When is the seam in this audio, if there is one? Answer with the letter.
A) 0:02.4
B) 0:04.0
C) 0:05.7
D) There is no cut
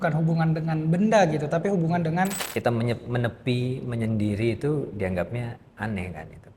A